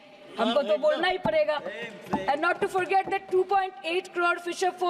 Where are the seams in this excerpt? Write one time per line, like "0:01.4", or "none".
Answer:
none